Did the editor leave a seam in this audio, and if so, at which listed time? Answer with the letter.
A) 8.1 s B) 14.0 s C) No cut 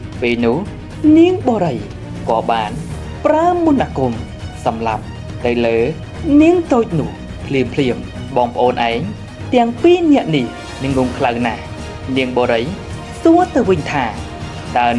A